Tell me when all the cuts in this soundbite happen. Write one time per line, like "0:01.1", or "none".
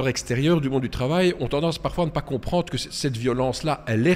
none